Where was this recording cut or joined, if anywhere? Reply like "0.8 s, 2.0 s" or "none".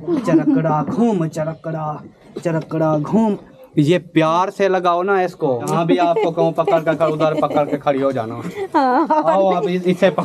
5.7 s